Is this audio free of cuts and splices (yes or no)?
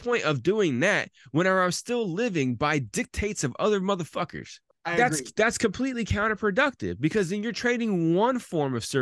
no